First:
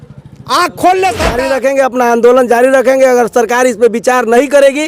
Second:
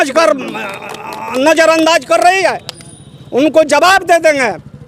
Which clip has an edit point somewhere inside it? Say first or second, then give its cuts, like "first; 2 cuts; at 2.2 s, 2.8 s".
first; 1 cut; at 1.3 s